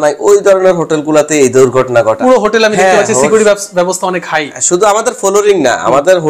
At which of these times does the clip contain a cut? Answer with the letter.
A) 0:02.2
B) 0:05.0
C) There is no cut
A